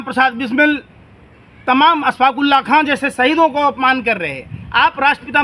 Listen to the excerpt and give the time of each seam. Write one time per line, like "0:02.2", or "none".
none

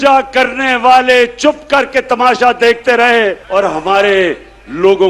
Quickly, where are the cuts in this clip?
0:03.4

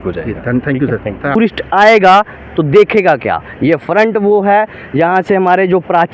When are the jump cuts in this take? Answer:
0:01.4

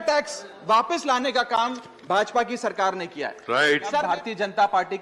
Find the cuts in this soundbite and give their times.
0:04.0

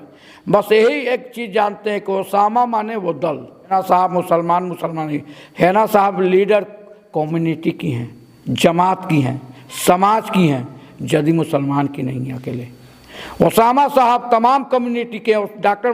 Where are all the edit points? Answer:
0:03.7

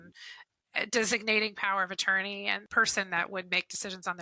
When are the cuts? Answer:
0:02.6

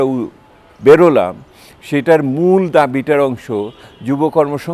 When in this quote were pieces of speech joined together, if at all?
none

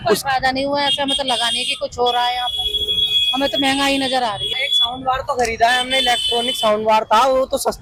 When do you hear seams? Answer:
none

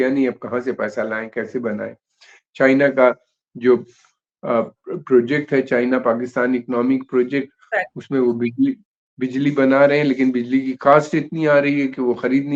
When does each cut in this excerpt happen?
none

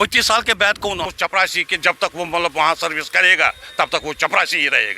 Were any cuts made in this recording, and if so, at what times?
0:01.1

